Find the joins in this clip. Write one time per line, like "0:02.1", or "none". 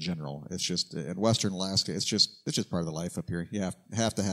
0:02.4